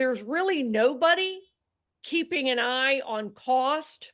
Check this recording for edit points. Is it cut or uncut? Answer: uncut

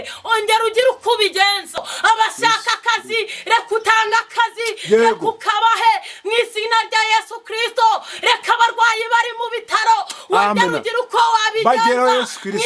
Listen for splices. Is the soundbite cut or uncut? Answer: cut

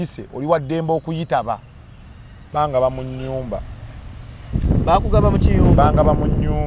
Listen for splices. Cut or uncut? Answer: cut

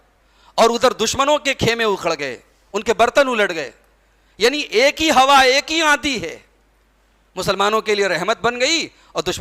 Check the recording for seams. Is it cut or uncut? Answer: uncut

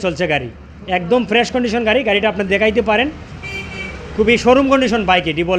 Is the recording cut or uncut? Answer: uncut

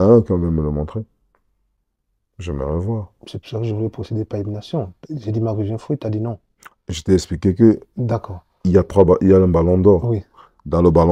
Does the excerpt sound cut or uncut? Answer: uncut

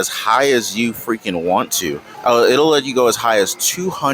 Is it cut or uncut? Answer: cut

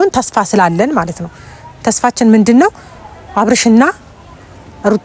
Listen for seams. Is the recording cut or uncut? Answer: uncut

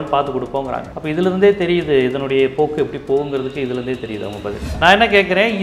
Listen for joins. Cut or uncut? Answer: cut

